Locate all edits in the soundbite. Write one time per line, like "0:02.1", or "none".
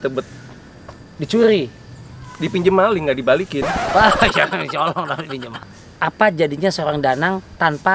0:05.5